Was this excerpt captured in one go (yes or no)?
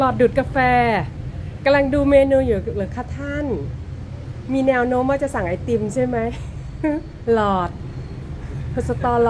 yes